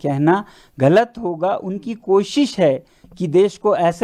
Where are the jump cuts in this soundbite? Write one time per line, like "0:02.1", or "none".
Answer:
none